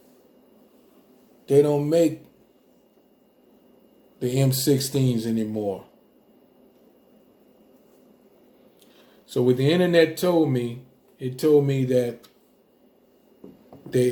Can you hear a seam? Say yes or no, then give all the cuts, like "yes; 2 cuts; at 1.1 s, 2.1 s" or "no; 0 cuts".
no; 0 cuts